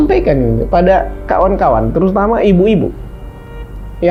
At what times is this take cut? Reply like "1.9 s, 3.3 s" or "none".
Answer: none